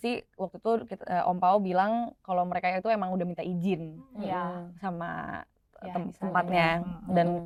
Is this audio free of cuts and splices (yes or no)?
yes